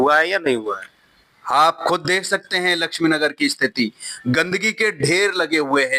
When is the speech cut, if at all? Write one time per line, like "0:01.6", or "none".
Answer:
none